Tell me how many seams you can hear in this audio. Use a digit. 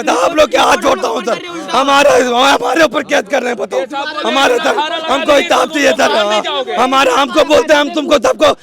0